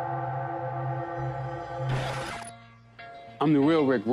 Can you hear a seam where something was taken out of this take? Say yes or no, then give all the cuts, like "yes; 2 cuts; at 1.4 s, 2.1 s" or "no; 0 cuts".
no; 0 cuts